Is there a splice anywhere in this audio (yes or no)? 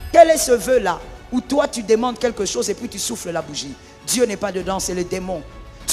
no